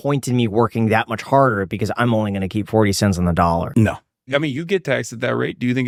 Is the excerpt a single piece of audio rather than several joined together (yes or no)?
yes